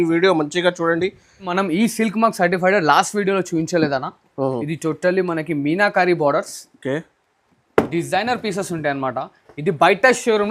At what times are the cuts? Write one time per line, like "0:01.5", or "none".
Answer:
0:01.5